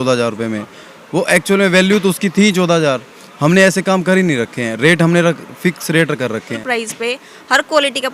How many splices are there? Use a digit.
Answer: 1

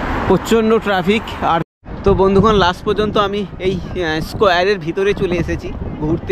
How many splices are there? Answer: 1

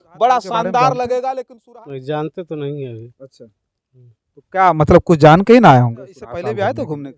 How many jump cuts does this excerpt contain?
2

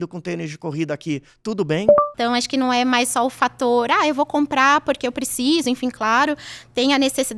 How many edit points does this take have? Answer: 1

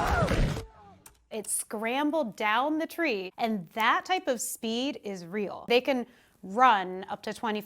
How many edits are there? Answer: 2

